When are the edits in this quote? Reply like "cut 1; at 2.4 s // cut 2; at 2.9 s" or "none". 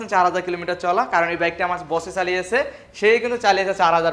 none